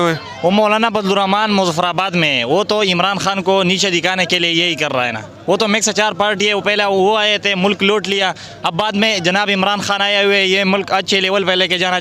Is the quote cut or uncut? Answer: uncut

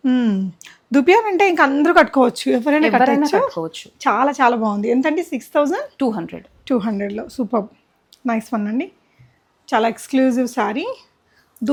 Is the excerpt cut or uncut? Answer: uncut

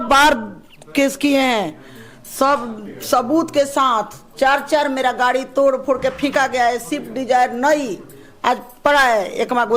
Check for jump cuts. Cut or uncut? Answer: uncut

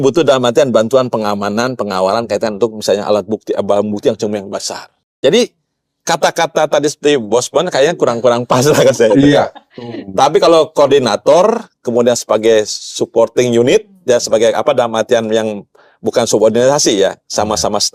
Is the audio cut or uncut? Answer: uncut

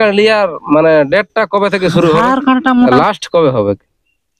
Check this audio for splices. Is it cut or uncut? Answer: cut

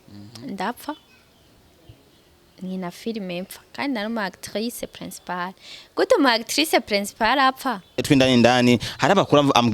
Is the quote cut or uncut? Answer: cut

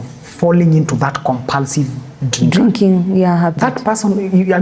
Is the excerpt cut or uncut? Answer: uncut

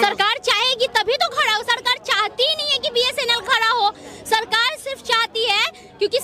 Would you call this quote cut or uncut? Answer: uncut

